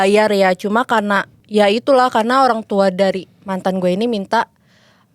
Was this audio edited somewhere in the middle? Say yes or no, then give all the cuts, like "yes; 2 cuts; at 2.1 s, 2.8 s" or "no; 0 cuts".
no; 0 cuts